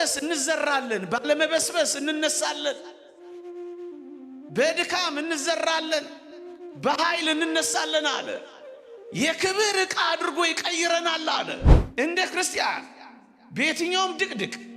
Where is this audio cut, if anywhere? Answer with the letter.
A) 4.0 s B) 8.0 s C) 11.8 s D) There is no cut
C